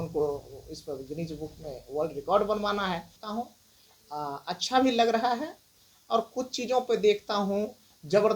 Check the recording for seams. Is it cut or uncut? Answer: cut